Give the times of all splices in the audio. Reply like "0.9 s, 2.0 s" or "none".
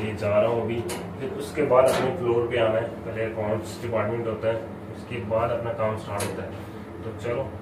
none